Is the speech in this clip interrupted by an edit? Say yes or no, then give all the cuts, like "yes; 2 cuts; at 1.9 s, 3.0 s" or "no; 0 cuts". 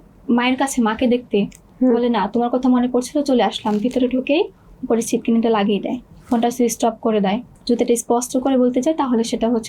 yes; 2 cuts; at 6.0 s, 7.5 s